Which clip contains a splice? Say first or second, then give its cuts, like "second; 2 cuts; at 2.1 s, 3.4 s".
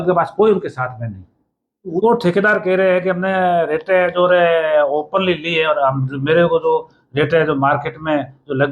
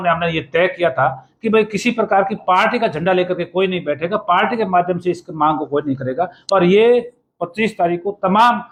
first; 1 cut; at 2.0 s